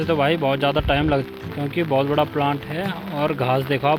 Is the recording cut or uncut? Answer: uncut